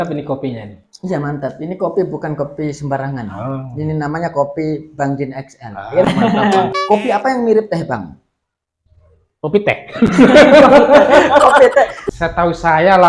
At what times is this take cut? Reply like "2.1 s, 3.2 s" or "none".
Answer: 12.0 s